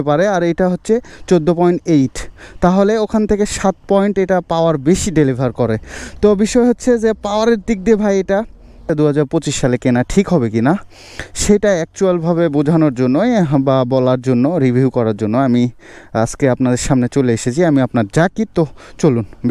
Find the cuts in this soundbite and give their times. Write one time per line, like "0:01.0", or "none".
0:08.9